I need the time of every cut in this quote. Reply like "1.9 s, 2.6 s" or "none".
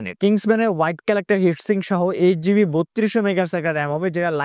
none